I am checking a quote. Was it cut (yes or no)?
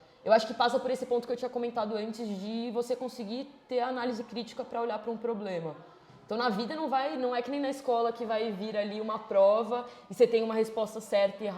no